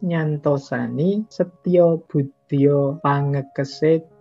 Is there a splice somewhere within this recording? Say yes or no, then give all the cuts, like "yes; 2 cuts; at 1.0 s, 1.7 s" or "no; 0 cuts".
yes; 2 cuts; at 1.3 s, 3.0 s